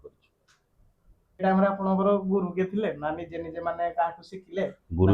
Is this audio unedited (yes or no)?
no